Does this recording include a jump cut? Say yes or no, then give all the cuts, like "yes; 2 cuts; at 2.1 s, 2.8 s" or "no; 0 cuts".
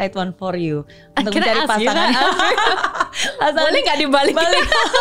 yes; 1 cut; at 2.7 s